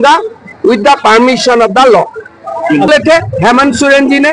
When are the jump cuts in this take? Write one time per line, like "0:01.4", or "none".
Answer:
0:02.9